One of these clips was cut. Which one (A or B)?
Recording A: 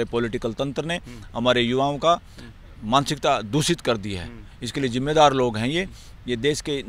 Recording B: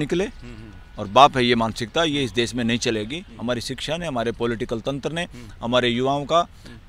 B